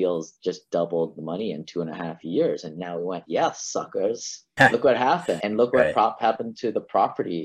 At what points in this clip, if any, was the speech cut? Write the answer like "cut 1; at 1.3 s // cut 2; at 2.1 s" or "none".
none